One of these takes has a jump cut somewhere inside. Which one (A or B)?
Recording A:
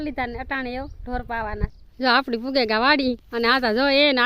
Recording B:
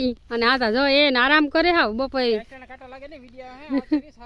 A